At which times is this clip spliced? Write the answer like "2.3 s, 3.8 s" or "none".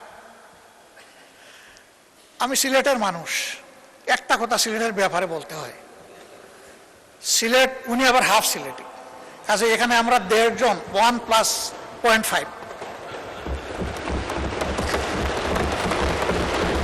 none